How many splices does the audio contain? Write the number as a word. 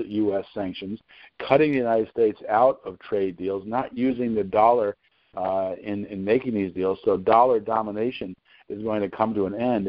zero